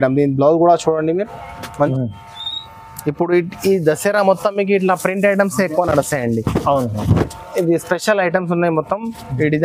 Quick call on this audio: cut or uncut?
cut